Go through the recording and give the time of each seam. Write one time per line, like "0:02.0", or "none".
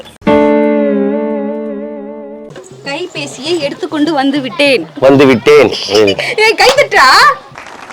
0:02.6